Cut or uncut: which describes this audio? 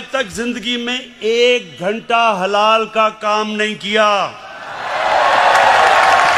uncut